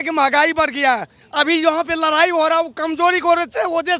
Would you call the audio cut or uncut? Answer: uncut